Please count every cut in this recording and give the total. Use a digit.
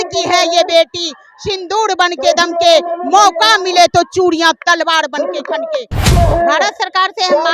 1